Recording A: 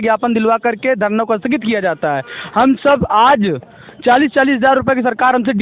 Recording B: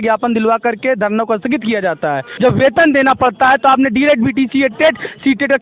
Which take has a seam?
B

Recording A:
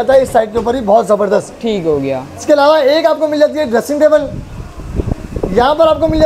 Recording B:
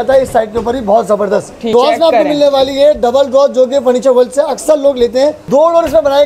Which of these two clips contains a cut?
B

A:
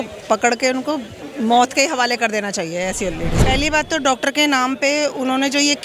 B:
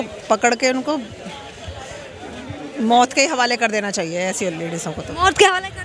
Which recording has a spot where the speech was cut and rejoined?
A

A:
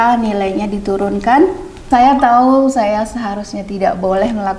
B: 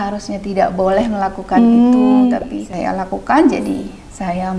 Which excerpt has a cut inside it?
A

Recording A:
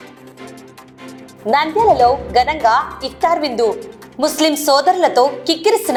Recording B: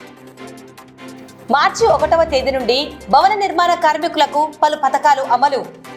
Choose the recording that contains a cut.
B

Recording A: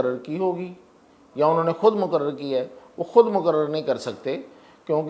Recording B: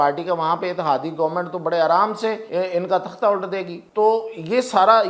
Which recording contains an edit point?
B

